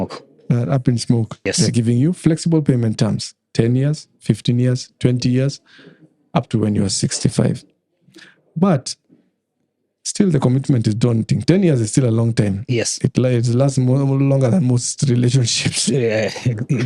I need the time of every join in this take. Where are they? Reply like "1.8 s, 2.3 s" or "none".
1.4 s